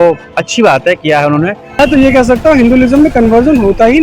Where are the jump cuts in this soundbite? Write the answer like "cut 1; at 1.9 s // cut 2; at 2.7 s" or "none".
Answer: cut 1; at 1.7 s

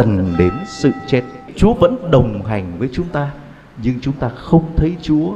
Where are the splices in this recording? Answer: cut 1; at 1.5 s

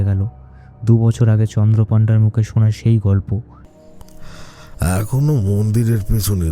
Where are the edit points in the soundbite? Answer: cut 1; at 3.6 s

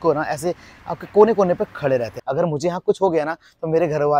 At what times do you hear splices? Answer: cut 1; at 2.1 s

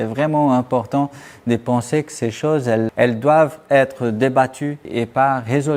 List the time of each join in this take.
cut 1; at 4.9 s

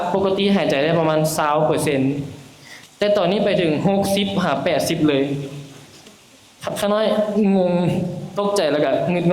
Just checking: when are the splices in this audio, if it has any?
none

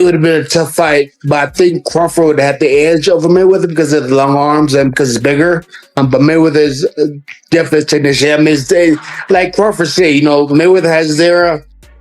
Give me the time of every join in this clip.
cut 1; at 6.0 s

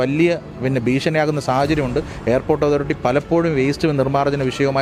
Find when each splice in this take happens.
none

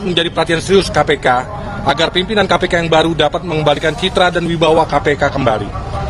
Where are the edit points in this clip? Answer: none

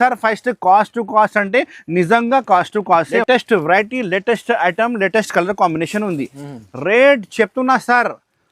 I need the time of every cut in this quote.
cut 1; at 3.2 s

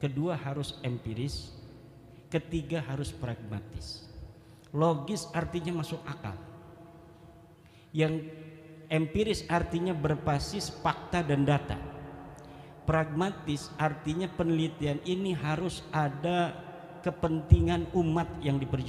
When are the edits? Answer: none

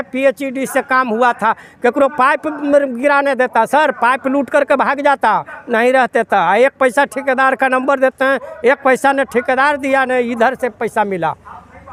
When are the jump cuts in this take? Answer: none

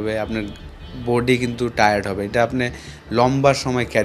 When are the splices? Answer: none

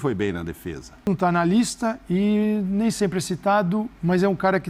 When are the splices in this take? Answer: cut 1; at 1.1 s

